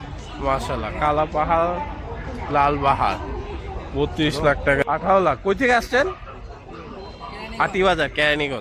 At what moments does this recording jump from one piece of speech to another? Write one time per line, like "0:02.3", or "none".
0:04.8